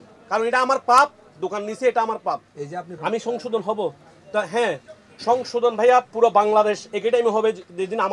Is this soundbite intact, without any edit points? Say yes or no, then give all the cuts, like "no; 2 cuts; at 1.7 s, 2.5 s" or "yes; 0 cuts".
no; 1 cut; at 2.9 s